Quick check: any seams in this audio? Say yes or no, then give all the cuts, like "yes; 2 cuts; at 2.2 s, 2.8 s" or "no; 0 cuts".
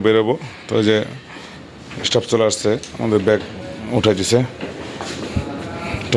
no; 0 cuts